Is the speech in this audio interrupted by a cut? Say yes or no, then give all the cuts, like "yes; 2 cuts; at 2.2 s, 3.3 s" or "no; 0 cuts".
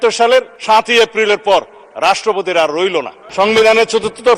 no; 0 cuts